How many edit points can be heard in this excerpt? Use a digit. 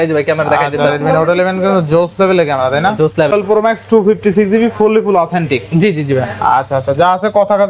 1